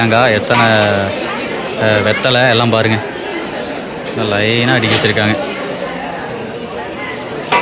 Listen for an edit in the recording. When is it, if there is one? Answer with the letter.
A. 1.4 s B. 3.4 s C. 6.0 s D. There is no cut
D